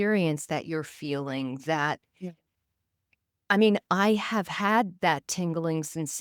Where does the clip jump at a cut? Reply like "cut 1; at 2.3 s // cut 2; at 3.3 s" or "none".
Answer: none